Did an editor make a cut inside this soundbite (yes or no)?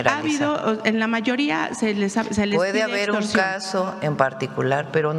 no